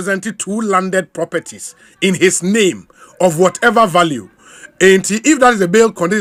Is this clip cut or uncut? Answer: uncut